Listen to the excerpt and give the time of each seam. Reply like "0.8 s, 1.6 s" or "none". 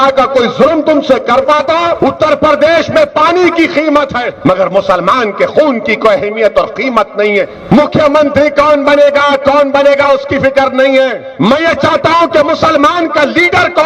2.0 s, 4.2 s, 7.6 s, 11.2 s